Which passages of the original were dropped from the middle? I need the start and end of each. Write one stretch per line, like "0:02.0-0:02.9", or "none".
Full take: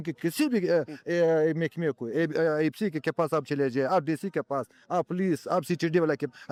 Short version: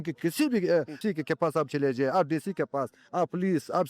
0:01.0-0:02.7